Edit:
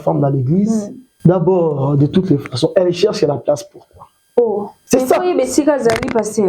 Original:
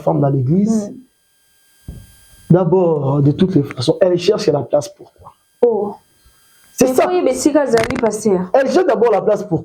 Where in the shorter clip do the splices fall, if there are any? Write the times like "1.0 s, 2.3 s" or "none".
1.0 s, 4.8 s